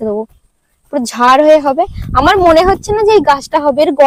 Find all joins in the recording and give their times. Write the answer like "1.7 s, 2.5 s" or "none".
none